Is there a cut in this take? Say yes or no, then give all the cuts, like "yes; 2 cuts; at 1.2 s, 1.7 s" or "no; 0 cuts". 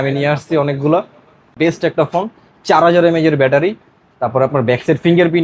yes; 1 cut; at 1.5 s